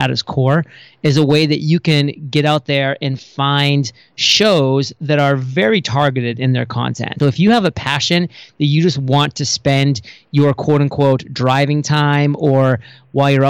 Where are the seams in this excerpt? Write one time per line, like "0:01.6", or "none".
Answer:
0:07.1